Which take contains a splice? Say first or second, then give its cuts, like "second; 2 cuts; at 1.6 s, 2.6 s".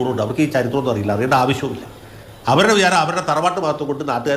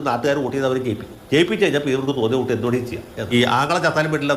second; 1 cut; at 3.3 s